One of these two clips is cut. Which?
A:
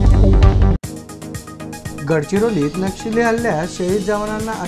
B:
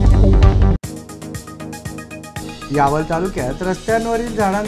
A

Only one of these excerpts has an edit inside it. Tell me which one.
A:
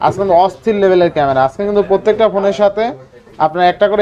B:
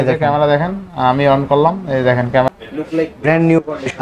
B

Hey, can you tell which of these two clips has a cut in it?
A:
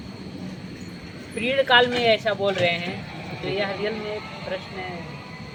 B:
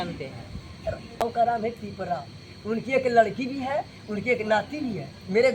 B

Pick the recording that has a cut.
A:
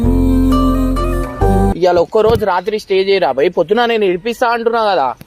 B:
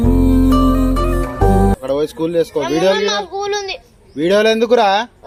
A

